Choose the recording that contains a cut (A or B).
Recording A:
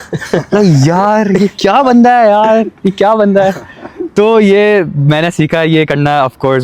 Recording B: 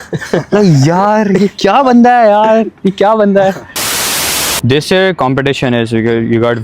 B